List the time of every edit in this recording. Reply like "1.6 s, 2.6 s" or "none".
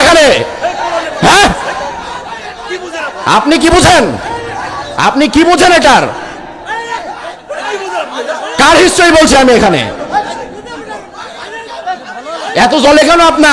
none